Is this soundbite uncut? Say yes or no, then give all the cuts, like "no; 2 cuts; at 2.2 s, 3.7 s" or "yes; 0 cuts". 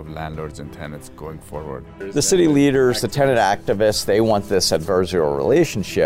no; 1 cut; at 2.1 s